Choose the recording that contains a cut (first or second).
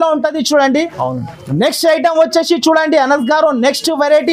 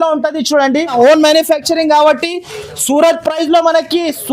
second